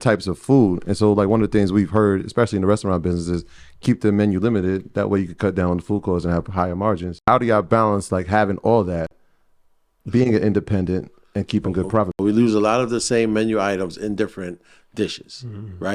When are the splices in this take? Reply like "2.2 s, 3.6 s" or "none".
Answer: 7.2 s, 12.1 s